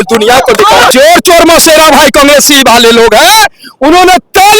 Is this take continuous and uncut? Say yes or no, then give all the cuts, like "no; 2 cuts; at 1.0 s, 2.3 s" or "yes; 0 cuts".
no; 1 cut; at 0.9 s